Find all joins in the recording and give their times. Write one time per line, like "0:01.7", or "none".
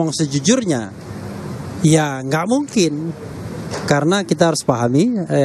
none